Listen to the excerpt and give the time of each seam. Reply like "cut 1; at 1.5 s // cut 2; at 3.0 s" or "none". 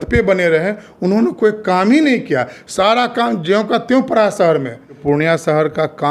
cut 1; at 5.0 s